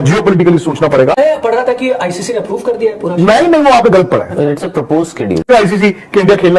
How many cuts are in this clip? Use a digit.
2